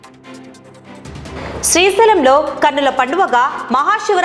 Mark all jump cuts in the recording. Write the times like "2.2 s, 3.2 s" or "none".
none